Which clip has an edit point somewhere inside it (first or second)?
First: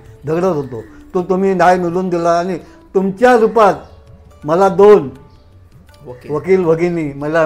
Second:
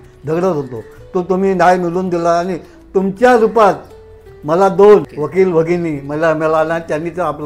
second